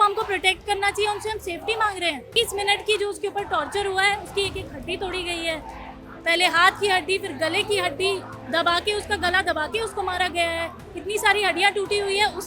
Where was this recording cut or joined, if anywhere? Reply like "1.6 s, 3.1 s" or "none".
2.4 s